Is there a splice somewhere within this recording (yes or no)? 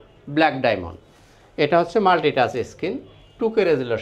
no